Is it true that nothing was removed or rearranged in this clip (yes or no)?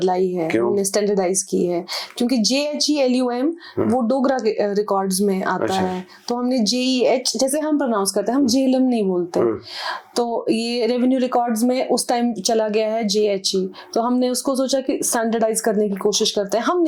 yes